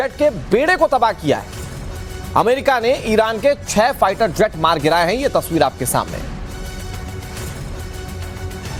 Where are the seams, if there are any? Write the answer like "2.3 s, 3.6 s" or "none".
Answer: none

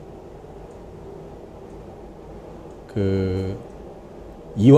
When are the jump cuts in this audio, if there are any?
2.3 s

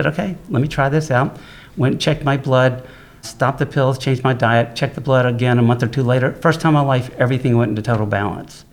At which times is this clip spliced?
3.3 s

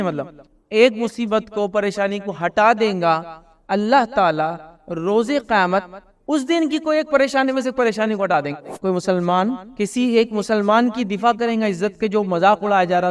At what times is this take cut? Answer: 8.7 s, 9.7 s

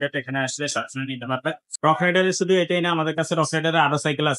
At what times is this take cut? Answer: 1.6 s

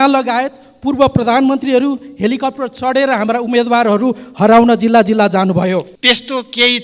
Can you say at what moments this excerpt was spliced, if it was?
5.9 s

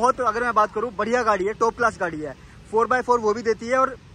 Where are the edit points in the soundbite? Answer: none

